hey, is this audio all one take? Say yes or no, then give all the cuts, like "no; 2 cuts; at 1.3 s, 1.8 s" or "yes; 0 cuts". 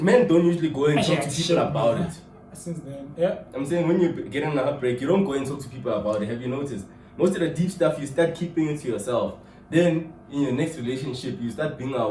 yes; 0 cuts